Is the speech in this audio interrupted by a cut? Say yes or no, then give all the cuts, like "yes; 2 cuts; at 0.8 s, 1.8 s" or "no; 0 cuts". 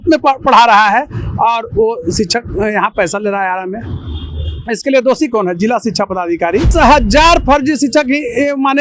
yes; 1 cut; at 6.7 s